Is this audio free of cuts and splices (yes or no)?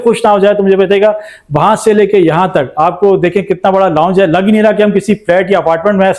yes